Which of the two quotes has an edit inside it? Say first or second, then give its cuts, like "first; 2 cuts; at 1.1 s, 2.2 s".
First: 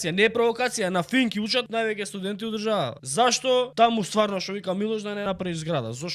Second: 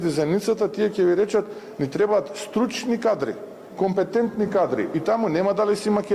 first; 4 cuts; at 1.7 s, 3.0 s, 3.7 s, 5.2 s